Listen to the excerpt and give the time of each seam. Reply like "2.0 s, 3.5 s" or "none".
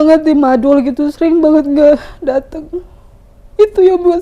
none